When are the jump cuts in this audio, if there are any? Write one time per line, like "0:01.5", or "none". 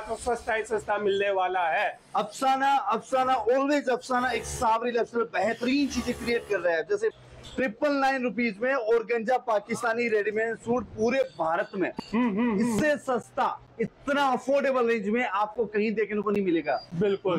0:07.1